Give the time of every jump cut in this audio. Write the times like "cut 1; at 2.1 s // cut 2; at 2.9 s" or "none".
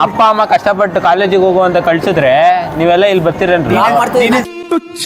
none